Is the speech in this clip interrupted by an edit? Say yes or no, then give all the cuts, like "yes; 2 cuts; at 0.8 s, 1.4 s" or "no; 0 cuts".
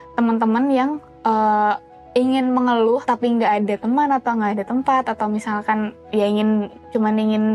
no; 0 cuts